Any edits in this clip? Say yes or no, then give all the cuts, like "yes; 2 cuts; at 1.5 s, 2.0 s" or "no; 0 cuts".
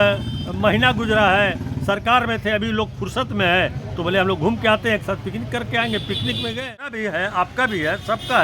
yes; 1 cut; at 7.0 s